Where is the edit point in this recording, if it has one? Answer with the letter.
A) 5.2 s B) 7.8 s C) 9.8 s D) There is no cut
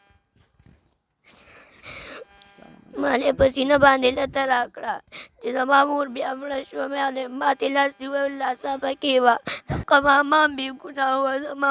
C